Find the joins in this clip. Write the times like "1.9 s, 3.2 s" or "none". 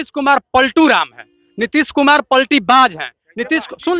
none